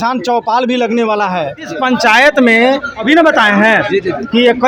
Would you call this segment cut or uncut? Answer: cut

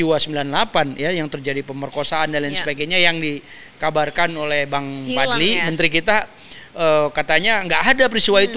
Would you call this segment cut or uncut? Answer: uncut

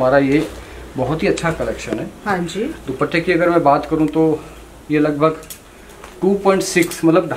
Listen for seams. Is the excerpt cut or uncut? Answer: uncut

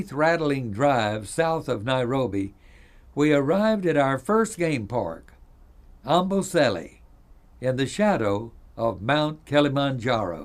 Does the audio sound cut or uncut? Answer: cut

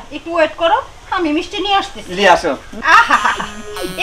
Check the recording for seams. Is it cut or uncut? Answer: cut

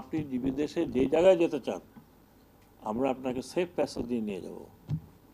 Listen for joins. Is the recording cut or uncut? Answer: uncut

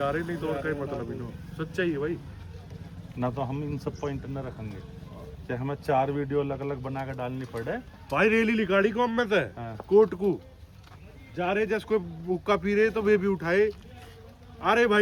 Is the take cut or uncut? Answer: uncut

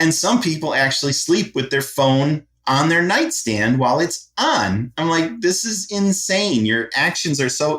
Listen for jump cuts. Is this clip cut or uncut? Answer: uncut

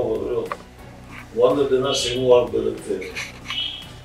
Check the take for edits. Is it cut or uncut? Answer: uncut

